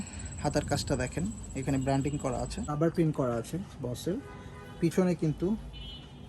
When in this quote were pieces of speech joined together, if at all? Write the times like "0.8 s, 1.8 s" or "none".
2.7 s